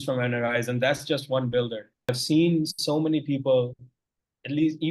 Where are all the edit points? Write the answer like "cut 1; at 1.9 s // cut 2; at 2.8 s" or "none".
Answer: cut 1; at 2.1 s